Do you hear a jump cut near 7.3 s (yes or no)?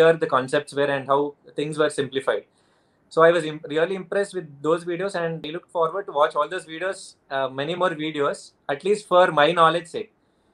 no